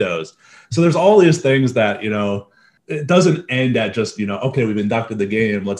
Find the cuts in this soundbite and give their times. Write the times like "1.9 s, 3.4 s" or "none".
2.7 s